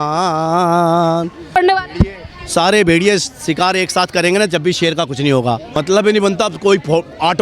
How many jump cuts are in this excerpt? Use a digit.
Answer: 2